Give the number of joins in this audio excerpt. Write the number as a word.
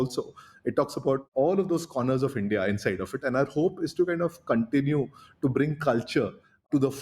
one